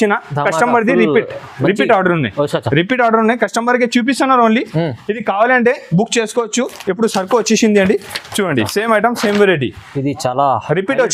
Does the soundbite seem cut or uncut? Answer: uncut